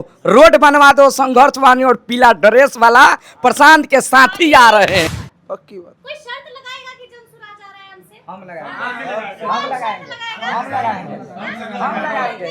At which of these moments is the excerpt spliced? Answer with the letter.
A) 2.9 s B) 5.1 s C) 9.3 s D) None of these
B